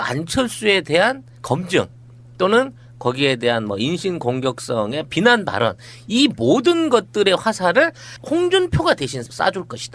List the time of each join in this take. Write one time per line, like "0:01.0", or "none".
0:06.0

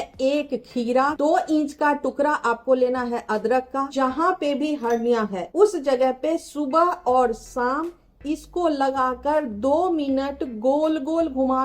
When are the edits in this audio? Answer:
0:01.2
0:03.9
0:05.4

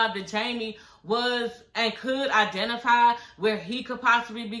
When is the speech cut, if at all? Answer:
none

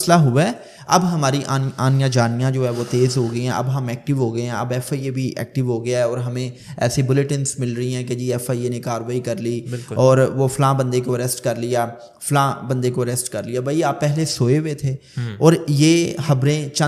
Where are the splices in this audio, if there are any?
none

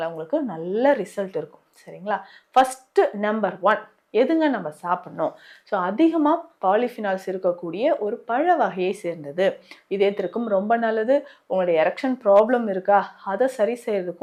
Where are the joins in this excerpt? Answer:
none

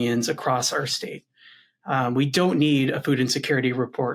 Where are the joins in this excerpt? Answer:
none

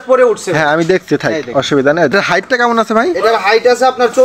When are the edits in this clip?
0:02.1

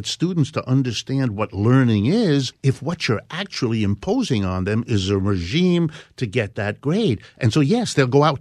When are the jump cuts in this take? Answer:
0:02.5

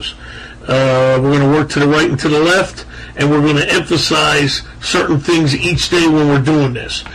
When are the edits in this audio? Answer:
0:01.8

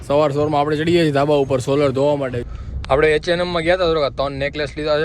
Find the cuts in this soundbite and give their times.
0:02.5

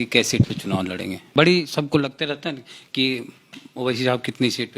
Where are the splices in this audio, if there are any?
0:01.2

